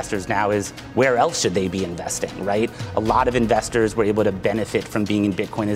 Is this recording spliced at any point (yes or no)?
no